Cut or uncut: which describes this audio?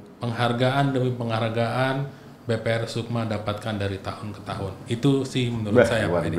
uncut